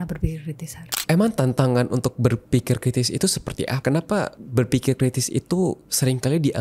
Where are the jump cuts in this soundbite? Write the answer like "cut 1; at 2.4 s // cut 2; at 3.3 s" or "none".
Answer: cut 1; at 0.8 s // cut 2; at 3.8 s // cut 3; at 4.4 s